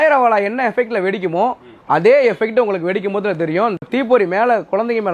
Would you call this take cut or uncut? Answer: uncut